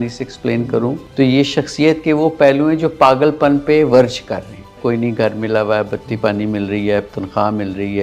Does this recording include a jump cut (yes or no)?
yes